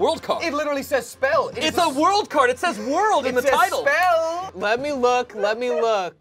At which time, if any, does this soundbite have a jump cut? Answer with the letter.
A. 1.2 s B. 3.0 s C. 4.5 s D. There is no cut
C